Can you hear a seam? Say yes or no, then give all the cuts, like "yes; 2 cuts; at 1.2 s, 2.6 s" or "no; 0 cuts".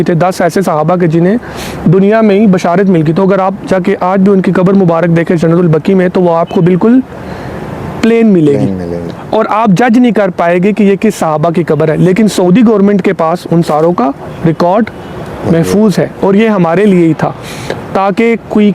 no; 0 cuts